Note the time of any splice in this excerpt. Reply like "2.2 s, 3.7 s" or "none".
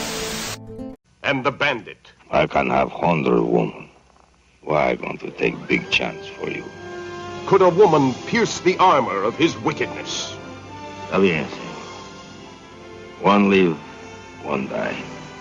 1.2 s